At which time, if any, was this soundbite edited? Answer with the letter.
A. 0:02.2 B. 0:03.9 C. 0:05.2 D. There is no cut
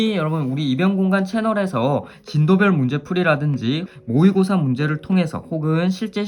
B